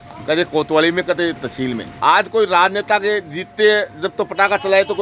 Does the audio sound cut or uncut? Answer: cut